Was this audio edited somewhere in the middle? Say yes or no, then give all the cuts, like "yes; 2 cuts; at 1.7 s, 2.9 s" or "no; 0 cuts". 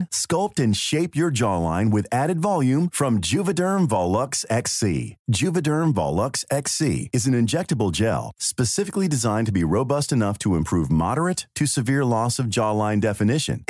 no; 0 cuts